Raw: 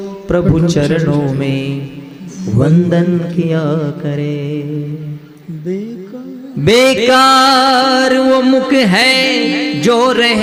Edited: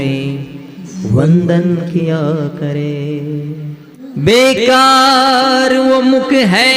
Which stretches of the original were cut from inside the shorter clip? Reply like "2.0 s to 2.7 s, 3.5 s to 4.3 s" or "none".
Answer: 5.4 s to 6.3 s

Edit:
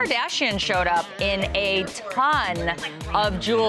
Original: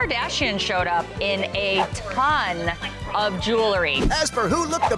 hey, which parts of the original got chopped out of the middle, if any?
none

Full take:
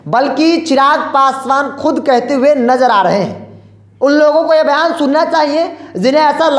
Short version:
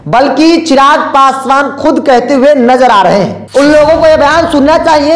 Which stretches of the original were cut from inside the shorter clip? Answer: 3.4 s to 3.8 s

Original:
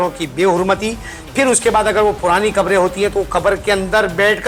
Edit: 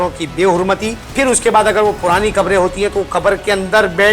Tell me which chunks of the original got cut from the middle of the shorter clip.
1.0 s to 1.2 s

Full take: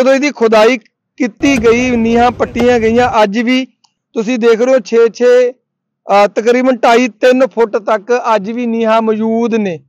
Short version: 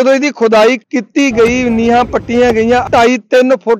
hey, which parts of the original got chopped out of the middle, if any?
0.9 s to 1.2 s, 3.1 s to 6.8 s

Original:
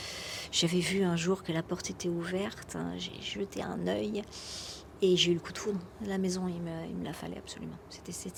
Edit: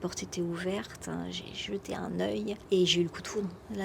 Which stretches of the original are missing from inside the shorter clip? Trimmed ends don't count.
4.3 s to 4.9 s

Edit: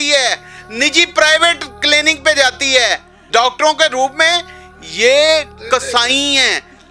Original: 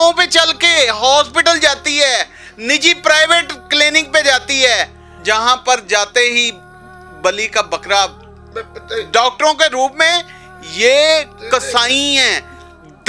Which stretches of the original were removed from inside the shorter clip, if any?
5.1 s to 9.0 s

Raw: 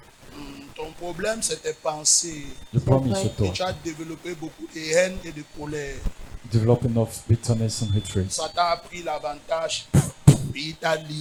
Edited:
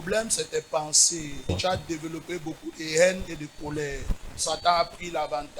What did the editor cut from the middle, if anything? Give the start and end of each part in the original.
2.7 s to 3.5 s, 6.4 s to 8.3 s

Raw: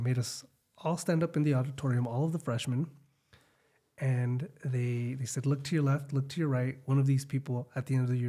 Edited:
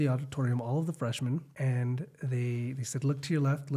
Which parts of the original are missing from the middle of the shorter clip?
3.0 s to 3.9 s

